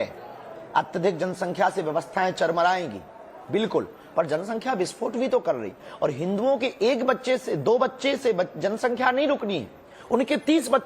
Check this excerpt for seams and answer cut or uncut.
cut